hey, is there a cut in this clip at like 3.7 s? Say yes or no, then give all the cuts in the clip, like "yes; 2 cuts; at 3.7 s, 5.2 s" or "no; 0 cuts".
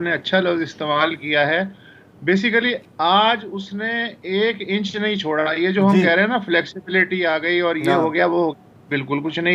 no; 0 cuts